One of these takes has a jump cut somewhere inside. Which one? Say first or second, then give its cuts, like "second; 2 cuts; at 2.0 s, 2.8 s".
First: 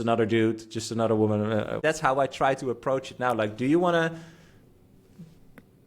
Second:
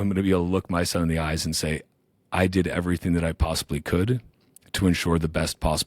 first; 1 cut; at 1.8 s